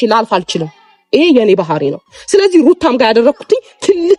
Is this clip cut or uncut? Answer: uncut